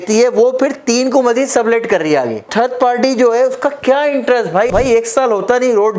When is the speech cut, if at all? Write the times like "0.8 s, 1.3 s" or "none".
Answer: 2.5 s, 4.7 s